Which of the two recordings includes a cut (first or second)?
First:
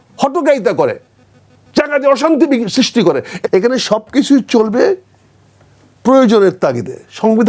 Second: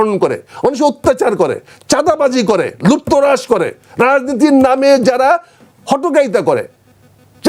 first